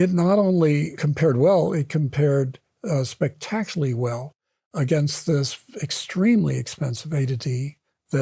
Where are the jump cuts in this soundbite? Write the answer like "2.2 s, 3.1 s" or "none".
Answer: 1.0 s